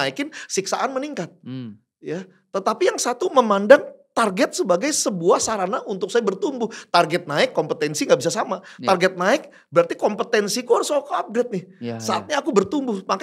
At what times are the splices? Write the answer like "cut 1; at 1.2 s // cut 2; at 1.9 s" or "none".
none